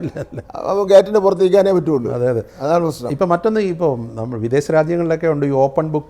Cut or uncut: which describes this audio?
uncut